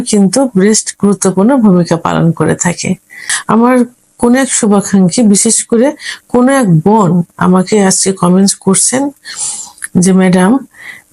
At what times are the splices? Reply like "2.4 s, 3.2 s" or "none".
3.3 s